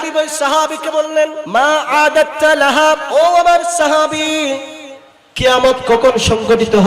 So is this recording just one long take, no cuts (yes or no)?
no